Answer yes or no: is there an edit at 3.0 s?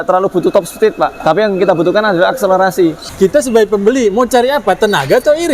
yes